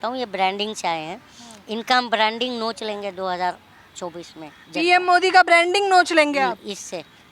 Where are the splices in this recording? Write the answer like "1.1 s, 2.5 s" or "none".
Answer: none